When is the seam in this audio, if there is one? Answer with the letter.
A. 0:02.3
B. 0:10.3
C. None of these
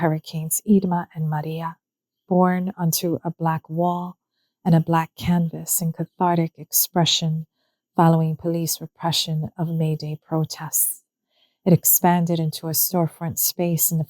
A